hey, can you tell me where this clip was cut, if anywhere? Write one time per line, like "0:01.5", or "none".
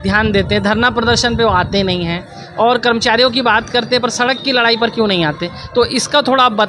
none